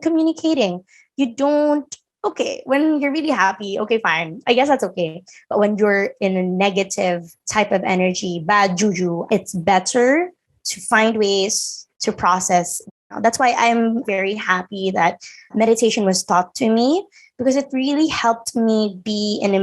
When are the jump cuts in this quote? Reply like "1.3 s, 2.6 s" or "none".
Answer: 9.2 s, 13.0 s